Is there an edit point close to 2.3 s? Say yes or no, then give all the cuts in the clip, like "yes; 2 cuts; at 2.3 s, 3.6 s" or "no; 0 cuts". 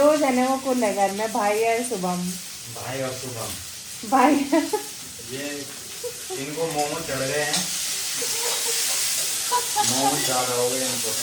no; 0 cuts